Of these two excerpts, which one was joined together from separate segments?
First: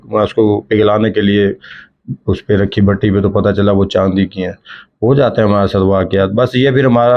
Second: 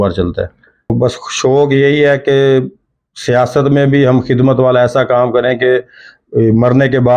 second; 1 cut; at 0.9 s

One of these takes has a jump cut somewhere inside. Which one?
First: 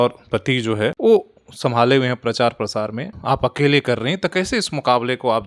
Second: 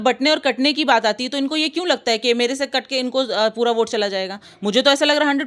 first; 2 cuts; at 1.0 s, 3.1 s

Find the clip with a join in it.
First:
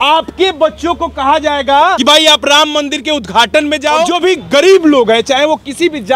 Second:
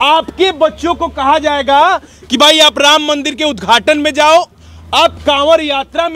first; 2 cuts; at 2.0 s, 4.1 s

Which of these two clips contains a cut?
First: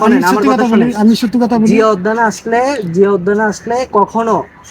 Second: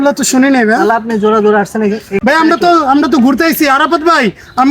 second; 1 cut; at 2.2 s

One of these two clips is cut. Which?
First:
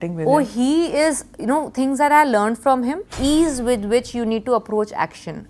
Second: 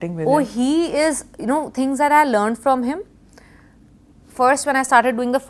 first; 1 cut; at 3.1 s

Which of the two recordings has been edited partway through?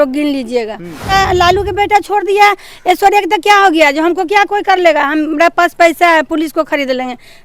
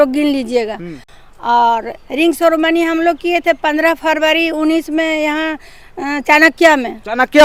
first; 1 cut; at 1.1 s

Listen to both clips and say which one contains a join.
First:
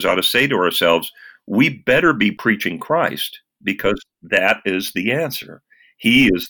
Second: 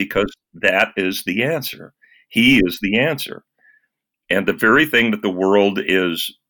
first; 1 cut; at 2.4 s

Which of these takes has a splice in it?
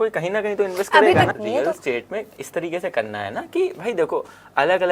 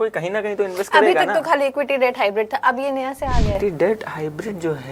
first; 1 cut; at 1.3 s

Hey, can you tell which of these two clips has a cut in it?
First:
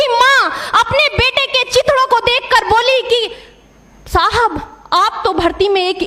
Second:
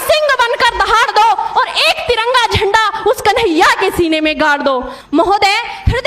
second; 1 cut; at 4.9 s

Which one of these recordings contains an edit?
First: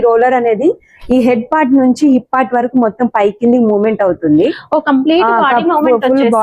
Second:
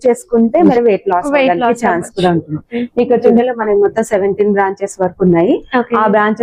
second; 2 cuts; at 0.7 s, 3.3 s

